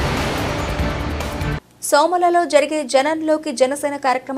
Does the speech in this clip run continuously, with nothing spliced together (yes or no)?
yes